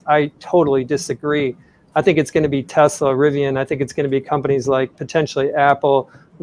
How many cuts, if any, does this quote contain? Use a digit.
0